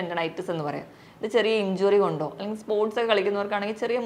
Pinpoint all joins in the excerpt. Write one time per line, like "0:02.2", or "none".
none